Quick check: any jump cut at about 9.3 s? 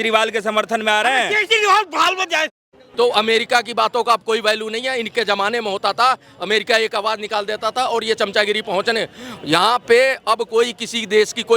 no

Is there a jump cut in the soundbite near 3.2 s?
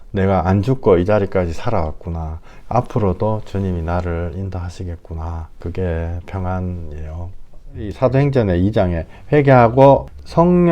no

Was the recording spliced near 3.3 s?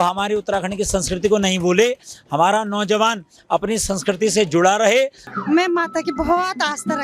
no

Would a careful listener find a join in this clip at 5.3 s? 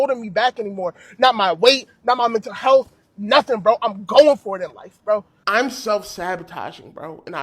yes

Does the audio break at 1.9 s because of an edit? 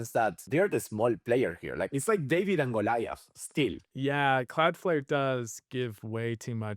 yes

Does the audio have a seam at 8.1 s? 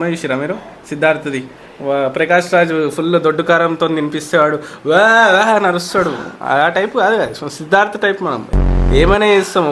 no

